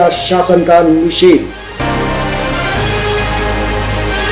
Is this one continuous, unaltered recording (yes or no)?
no